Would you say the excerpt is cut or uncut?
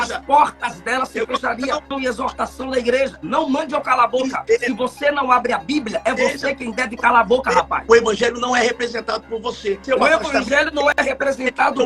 cut